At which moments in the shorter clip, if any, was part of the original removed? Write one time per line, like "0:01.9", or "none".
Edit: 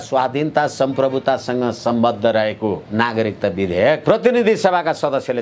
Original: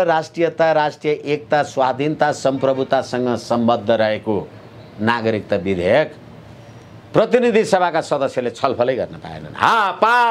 0:02.8
0:04.0